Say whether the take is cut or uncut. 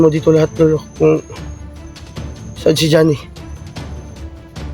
cut